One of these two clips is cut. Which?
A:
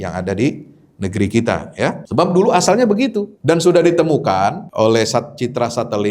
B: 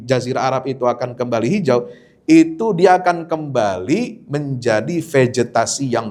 A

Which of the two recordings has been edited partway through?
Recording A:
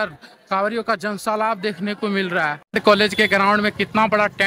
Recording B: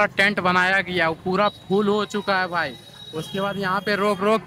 A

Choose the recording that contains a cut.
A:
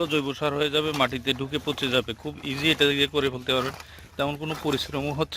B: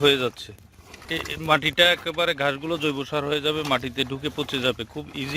B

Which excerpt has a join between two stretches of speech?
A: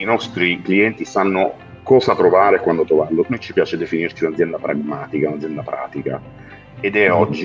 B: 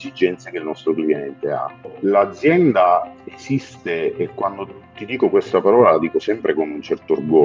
B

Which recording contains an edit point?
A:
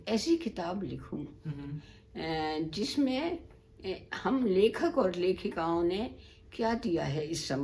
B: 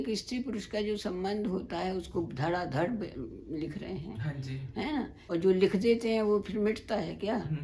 B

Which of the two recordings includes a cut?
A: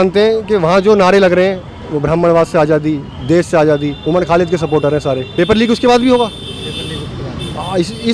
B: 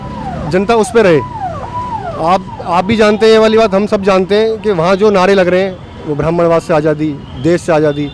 A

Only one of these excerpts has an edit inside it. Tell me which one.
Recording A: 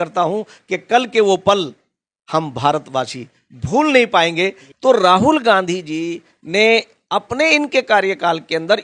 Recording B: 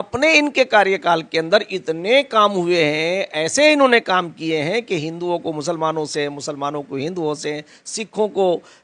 A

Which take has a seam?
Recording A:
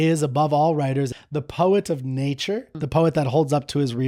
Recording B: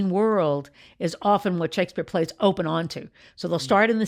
A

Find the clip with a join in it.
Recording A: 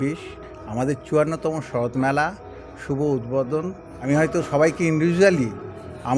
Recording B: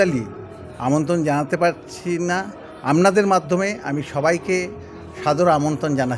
A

